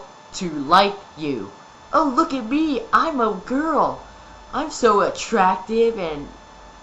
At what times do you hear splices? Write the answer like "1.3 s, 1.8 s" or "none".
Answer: 1.8 s

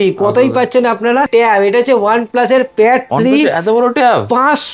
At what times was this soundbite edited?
1.3 s

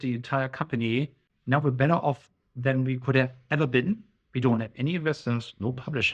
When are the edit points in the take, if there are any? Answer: 1.3 s

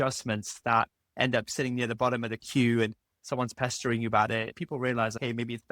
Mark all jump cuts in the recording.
4.6 s

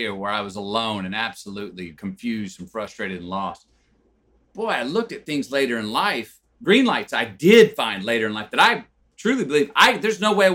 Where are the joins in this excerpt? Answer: 6.5 s

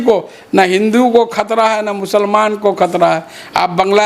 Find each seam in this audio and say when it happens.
none

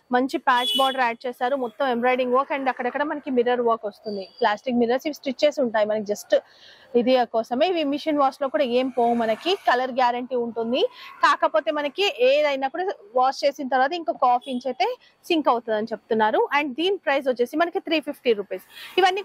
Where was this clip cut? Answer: none

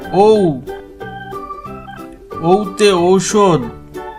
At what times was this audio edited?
none

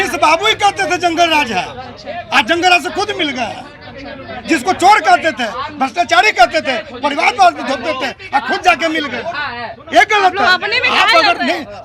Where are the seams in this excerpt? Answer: none

